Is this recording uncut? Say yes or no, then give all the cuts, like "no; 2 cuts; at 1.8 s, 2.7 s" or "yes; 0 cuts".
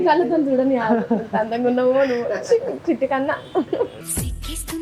yes; 0 cuts